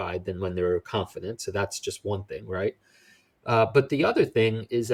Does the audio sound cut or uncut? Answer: uncut